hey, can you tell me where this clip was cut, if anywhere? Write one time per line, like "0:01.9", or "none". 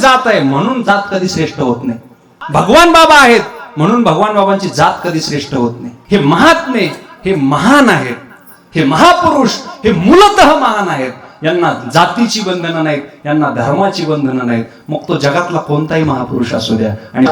0:02.3
0:05.9